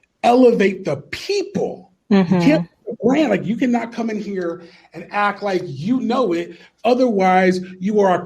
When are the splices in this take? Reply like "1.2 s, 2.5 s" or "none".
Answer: 1.9 s

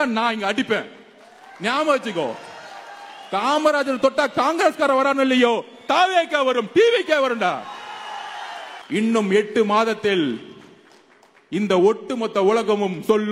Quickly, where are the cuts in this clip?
8.7 s

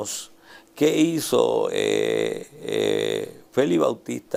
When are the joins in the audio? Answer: none

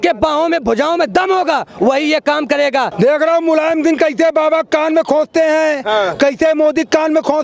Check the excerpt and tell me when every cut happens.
2.9 s

